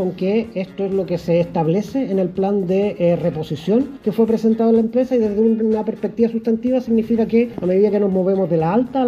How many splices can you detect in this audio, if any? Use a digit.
2